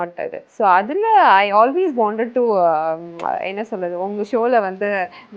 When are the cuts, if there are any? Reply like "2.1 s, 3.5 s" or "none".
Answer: none

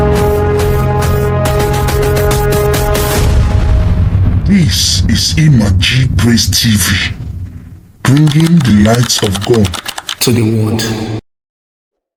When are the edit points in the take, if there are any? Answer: none

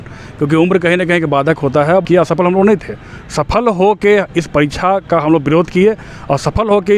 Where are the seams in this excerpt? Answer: 2.0 s

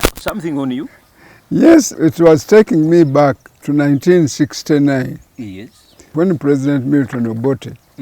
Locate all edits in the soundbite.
1.9 s, 3.5 s, 6.1 s

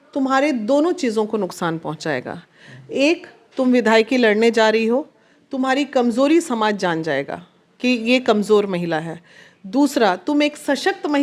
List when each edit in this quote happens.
none

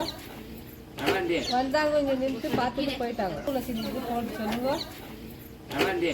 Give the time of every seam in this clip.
3.5 s

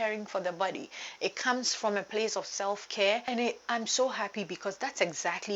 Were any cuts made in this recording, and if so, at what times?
3.3 s

